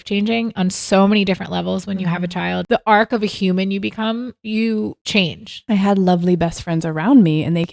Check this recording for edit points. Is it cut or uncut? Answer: cut